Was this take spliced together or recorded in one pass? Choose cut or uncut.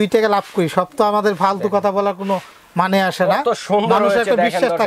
uncut